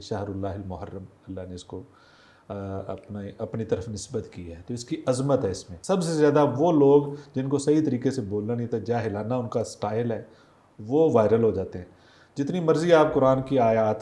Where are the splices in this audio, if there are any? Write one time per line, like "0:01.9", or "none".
0:05.7